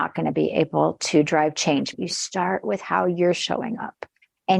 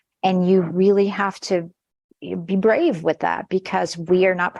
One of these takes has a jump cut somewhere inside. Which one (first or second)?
first